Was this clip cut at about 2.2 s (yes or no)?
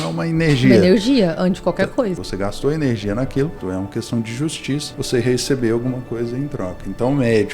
yes